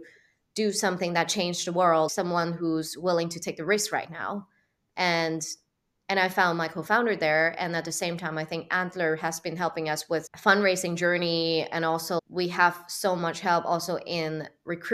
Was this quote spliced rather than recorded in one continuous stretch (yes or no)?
yes